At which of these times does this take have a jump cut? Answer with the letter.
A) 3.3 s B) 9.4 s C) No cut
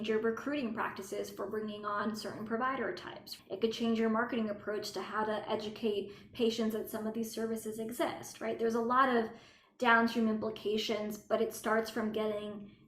A